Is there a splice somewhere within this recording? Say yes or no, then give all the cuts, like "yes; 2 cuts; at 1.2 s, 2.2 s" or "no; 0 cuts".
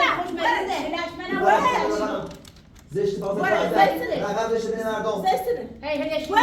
no; 0 cuts